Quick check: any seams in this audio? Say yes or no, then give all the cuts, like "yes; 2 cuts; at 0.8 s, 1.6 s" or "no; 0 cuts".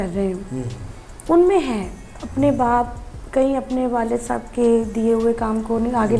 no; 0 cuts